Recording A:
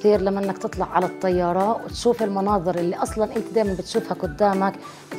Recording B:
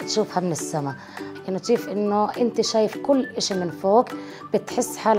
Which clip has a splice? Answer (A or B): B